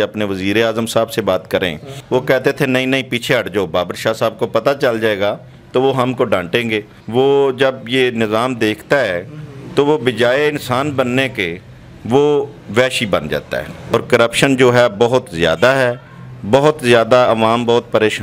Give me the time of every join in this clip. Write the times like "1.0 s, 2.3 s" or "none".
1.9 s, 6.9 s, 13.9 s